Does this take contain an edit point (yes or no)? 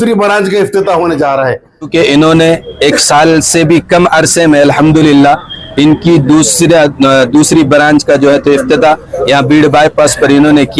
yes